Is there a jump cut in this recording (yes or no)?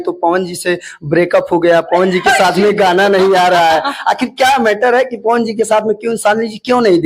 no